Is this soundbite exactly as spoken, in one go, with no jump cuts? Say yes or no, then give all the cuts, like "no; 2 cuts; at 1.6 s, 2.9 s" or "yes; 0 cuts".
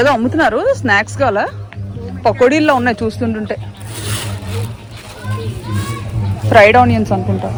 yes; 0 cuts